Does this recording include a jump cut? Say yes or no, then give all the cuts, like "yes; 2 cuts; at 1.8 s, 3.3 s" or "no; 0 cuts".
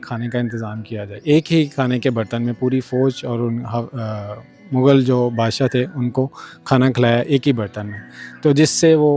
yes; 1 cut; at 1.2 s